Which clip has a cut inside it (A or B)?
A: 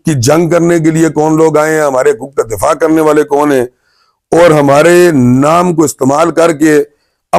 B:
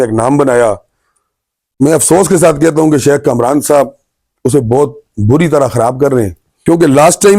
B